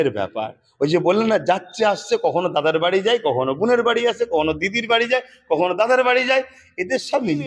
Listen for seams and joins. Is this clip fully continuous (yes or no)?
yes